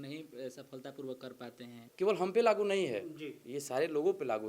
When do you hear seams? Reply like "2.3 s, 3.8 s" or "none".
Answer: 1.9 s

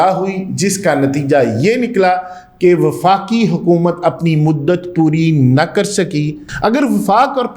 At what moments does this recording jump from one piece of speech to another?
6.4 s

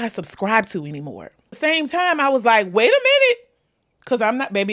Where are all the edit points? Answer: 1.5 s

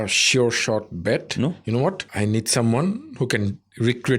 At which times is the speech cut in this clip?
2.1 s

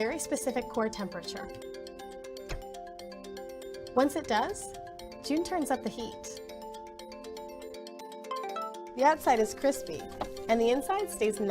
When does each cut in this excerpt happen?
5.7 s

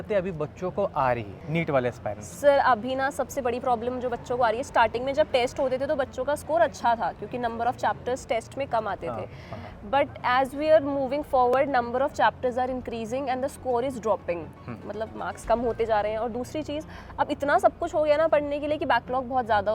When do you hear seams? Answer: 1.3 s

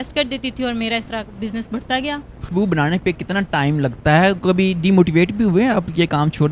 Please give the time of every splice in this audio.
none

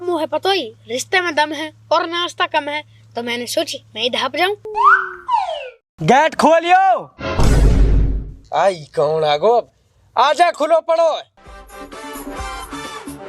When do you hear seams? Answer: 5.8 s

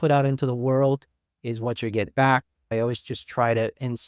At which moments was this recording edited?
2.7 s

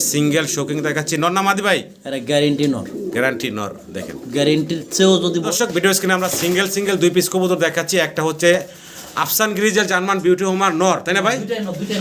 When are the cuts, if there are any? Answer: 5.4 s

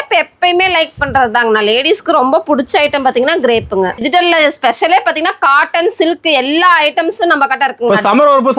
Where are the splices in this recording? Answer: 4.0 s

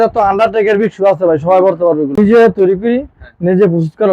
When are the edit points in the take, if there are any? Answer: 2.2 s

